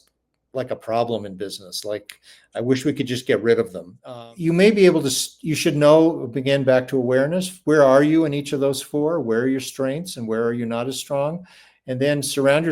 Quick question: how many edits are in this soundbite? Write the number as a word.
one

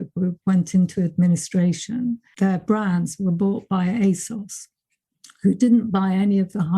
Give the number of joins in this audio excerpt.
one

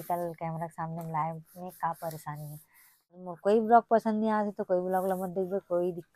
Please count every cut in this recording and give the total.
one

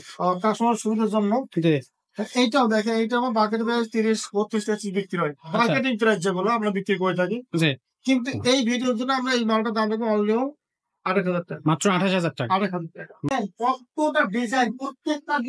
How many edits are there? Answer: one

